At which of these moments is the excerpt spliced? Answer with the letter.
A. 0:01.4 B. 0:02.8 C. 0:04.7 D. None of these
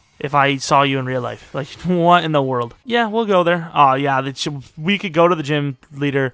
B